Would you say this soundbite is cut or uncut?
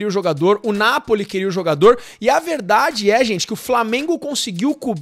uncut